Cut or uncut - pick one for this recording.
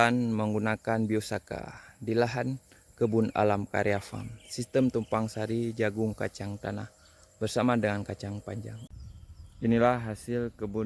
cut